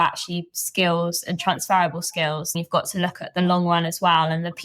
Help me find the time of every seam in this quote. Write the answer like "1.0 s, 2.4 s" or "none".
2.5 s